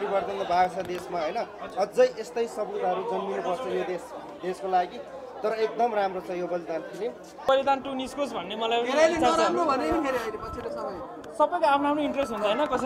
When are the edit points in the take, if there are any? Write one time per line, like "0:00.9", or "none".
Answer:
0:07.5